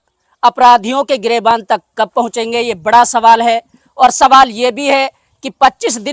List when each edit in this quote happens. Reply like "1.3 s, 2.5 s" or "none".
none